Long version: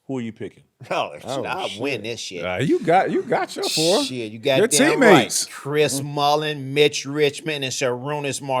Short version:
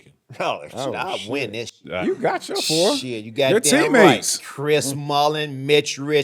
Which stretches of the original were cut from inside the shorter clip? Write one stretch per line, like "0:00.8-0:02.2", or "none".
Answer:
0:02.5-0:03.1